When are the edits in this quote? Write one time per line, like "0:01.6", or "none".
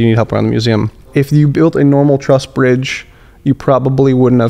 0:01.1